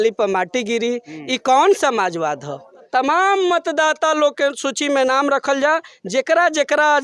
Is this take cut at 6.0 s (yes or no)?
no